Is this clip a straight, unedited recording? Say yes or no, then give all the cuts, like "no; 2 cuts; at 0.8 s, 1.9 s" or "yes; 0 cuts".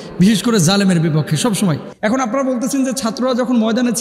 no; 1 cut; at 1.9 s